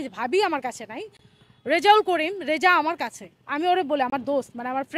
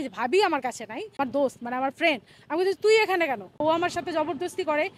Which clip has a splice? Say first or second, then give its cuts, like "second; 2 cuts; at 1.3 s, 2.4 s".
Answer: second; 2 cuts; at 1.2 s, 3.6 s